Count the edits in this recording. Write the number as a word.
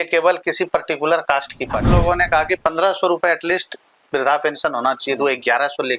one